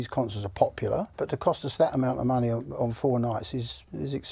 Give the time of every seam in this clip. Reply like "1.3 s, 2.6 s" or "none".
1.1 s